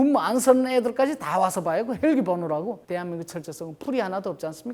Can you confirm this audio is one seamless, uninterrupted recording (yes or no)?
no